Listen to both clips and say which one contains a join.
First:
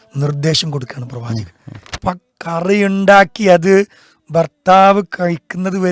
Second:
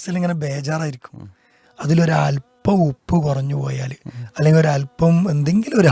first; 1 cut; at 1.9 s

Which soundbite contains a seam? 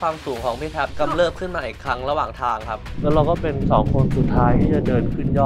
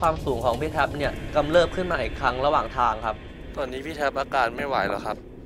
first; 2 cuts; at 0.9 s, 2.9 s

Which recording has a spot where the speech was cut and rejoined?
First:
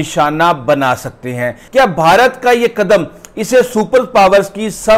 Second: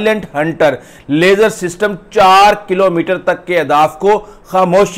first; 1 cut; at 1.6 s

